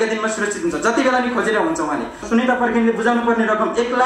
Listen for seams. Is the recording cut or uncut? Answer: cut